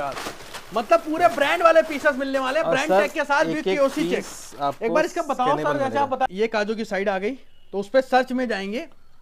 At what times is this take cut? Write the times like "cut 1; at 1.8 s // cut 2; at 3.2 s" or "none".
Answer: cut 1; at 6.3 s